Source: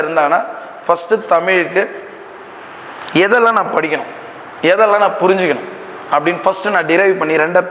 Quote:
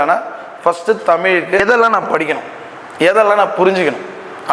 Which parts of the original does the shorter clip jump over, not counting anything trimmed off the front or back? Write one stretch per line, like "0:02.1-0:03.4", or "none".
0:01.8-0:03.2